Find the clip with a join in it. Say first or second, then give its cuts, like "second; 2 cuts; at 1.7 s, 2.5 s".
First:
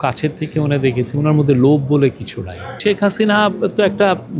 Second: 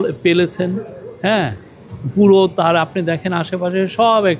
first; 1 cut; at 2.8 s